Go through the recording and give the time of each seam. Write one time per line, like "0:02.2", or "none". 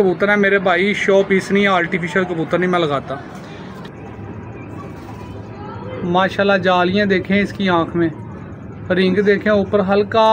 0:03.7